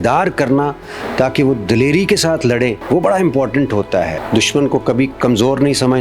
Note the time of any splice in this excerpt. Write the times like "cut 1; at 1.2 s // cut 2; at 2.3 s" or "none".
cut 1; at 2.8 s // cut 2; at 4.1 s

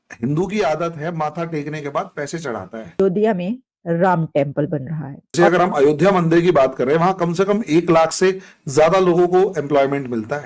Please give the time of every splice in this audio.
cut 1; at 3.0 s // cut 2; at 5.2 s

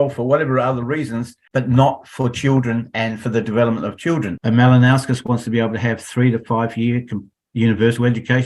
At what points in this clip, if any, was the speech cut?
cut 1; at 4.4 s

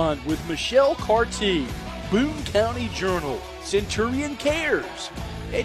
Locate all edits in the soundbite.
none

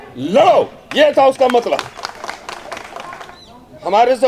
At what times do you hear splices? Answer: cut 1; at 3.3 s

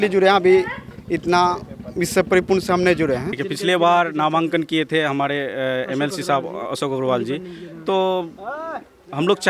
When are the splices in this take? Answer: cut 1; at 3.3 s

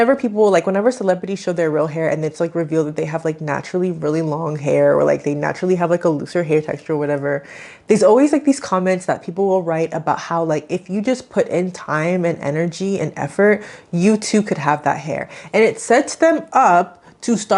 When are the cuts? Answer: none

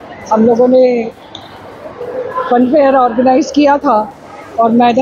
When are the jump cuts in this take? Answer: none

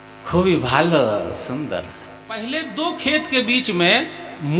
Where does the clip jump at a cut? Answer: cut 1; at 2.3 s

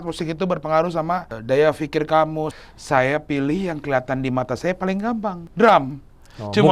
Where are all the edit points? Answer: cut 1; at 1.3 s // cut 2; at 2.5 s // cut 3; at 5.4 s

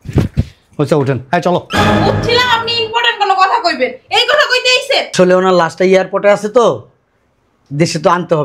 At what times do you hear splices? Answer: cut 1; at 5.1 s

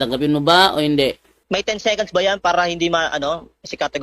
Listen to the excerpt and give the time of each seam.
cut 1; at 1.3 s

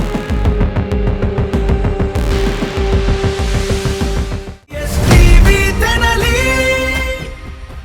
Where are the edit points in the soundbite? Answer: none

